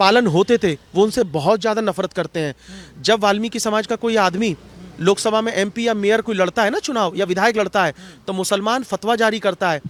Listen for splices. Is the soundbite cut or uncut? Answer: uncut